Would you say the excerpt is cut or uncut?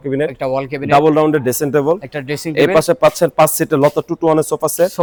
uncut